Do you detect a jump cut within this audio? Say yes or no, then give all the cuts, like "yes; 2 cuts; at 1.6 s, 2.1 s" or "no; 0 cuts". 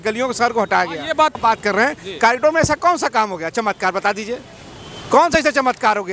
yes; 1 cut; at 1.3 s